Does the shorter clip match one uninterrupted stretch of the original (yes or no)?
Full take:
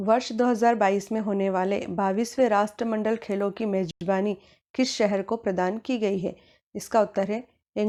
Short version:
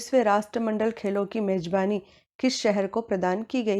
no